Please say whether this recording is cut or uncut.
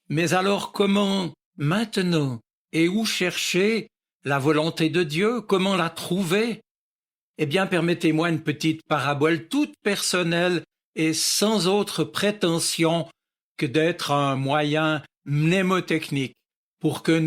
uncut